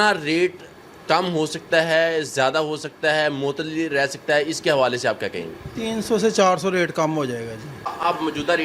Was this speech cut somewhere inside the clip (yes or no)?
no